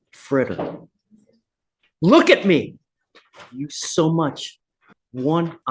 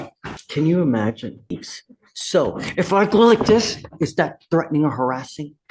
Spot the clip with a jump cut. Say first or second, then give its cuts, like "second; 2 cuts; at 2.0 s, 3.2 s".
second; 1 cut; at 1.7 s